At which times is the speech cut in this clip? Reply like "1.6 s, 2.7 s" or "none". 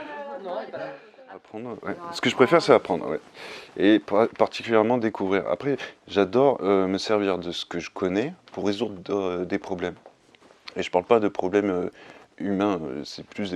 1.8 s